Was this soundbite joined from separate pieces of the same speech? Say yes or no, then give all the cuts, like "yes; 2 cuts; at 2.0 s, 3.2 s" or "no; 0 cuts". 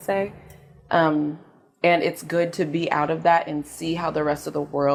no; 0 cuts